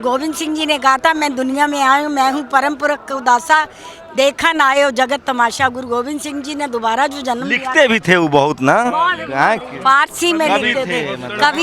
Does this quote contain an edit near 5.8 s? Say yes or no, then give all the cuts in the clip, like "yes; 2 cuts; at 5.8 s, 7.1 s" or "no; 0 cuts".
no; 0 cuts